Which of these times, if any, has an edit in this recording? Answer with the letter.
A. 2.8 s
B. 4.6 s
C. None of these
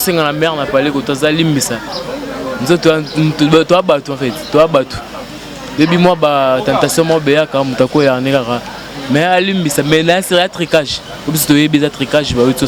C